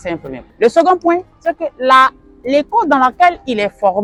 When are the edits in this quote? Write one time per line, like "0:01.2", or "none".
none